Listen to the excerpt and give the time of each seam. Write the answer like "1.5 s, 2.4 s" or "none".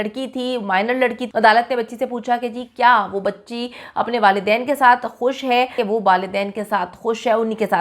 1.2 s, 5.7 s